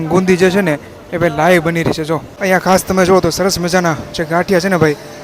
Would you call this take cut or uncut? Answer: cut